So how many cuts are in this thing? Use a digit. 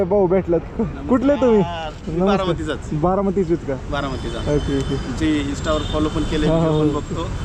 0